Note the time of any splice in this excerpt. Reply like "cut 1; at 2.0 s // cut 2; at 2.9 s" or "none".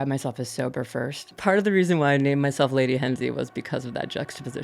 cut 1; at 1.3 s